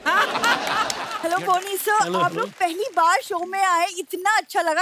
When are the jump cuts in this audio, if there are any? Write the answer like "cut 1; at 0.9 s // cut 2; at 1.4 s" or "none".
cut 1; at 1.0 s